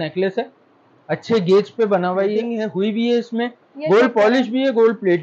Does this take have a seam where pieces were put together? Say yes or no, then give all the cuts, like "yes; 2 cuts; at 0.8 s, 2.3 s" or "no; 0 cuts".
yes; 1 cut; at 2.5 s